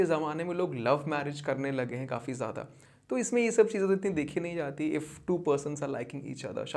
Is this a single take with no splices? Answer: yes; 0 cuts

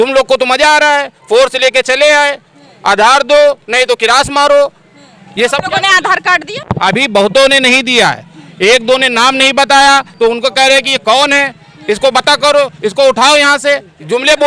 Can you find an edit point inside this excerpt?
no; 0 cuts

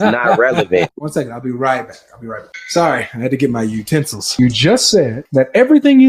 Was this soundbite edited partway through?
yes; 4 cuts; at 1.0 s, 2.5 s, 4.3 s, 5.2 s

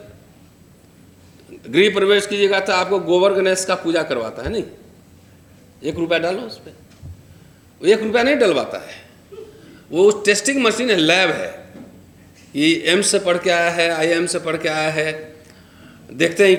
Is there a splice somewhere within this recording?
no; 0 cuts

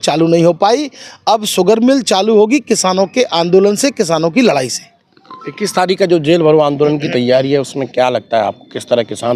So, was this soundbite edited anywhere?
no; 0 cuts

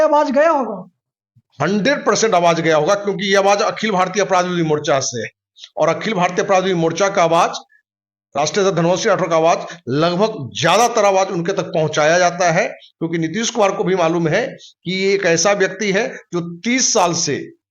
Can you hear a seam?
no; 0 cuts

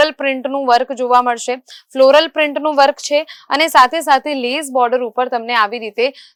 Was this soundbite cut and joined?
no; 0 cuts

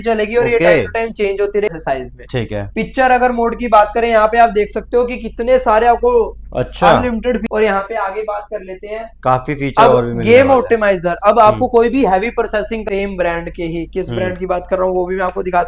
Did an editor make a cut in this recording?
yes; 3 cuts; at 1.8 s, 7.5 s, 12.8 s

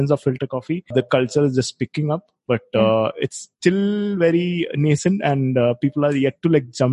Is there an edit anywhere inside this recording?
no; 0 cuts

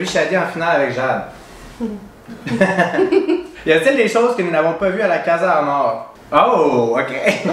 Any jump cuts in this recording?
yes; 2 cuts; at 3.5 s, 6.1 s

